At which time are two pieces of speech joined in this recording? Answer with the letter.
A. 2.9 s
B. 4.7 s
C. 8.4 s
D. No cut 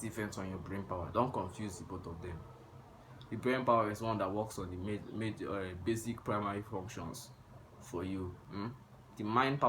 C